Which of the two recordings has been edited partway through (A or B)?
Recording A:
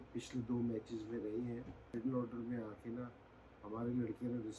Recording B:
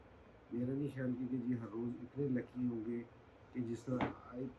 A